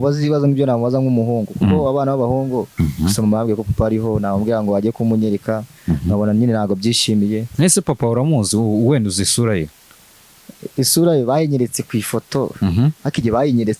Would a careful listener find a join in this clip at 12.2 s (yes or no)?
no